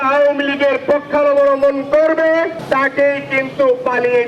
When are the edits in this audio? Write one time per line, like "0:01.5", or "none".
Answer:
0:02.6